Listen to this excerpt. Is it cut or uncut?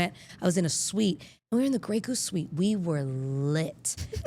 uncut